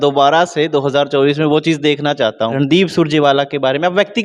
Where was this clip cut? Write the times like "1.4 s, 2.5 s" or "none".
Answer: 2.5 s

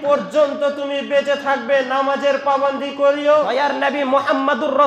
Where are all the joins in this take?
3.6 s

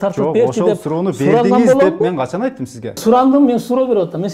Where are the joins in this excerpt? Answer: 3.0 s

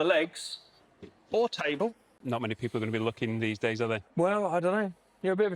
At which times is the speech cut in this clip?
2.2 s

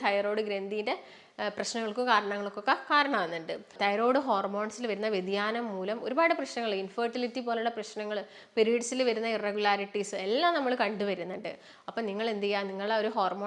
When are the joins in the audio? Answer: 3.7 s

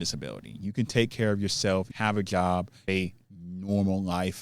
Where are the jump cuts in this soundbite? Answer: 1.9 s, 2.9 s

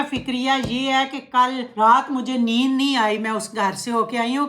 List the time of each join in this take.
1.6 s

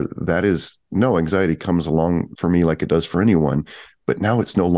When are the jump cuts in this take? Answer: 2.3 s

